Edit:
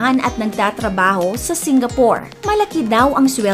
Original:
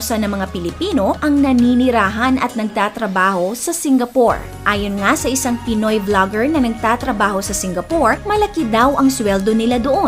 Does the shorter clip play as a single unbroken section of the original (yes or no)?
no